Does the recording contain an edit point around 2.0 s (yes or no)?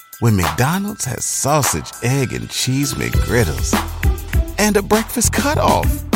no